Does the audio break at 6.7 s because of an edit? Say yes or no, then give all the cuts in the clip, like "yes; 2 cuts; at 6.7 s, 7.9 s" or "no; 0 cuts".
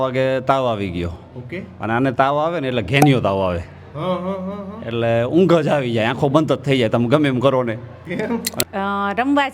no; 1 cut; at 8.6 s